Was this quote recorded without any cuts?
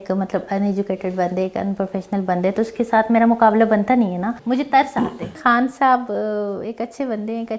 no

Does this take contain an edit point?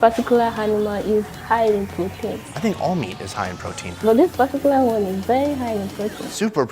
yes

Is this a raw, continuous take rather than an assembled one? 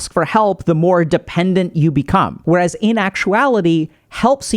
no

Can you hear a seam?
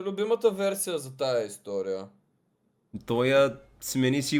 no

